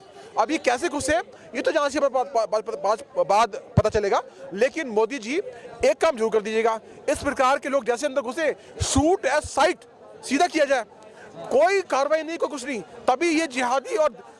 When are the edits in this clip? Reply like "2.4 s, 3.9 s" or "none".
none